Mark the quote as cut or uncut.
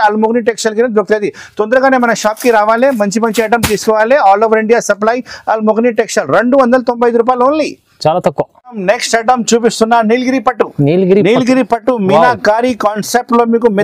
uncut